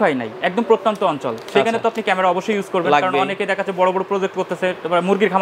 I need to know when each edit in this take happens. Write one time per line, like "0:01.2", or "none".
none